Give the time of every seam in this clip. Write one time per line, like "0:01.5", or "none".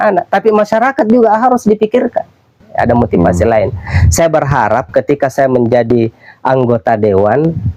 0:02.6